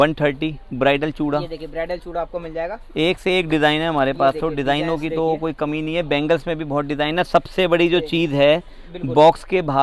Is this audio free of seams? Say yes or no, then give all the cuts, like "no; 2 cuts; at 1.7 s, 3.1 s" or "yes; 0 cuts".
yes; 0 cuts